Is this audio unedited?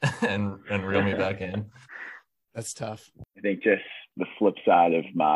no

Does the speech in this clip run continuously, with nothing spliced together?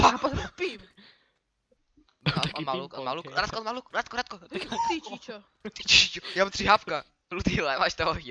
yes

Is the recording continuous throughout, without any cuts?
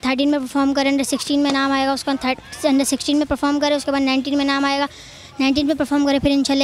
yes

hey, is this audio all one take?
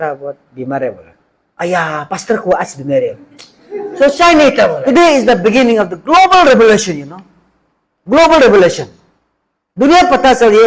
no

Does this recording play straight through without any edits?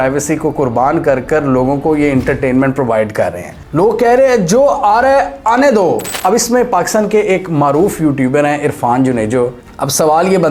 no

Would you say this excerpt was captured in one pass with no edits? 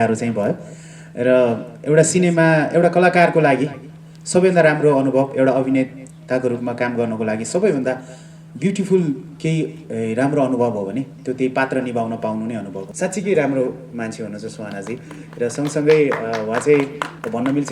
no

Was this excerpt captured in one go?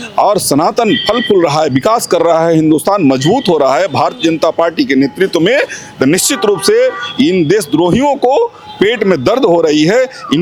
yes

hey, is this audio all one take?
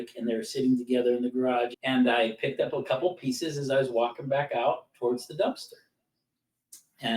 no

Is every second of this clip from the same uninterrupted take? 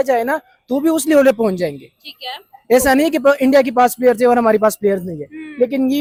yes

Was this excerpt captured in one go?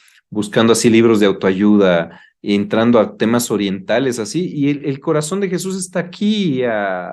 yes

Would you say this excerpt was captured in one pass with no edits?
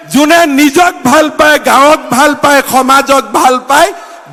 yes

